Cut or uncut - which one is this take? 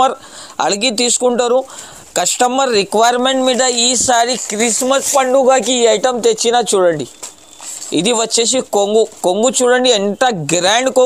uncut